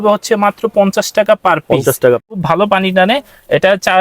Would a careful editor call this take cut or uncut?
cut